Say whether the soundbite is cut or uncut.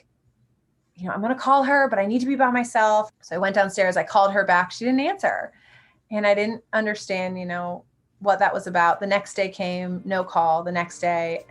cut